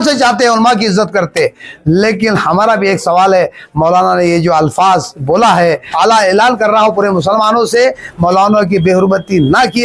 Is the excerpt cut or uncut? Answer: cut